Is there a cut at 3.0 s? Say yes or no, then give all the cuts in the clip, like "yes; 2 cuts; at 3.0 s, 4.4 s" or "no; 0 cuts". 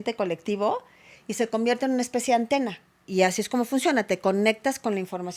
yes; 1 cut; at 3.0 s